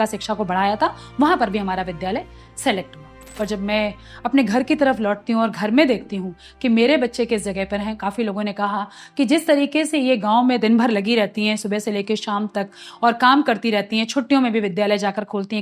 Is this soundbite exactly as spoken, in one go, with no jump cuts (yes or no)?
no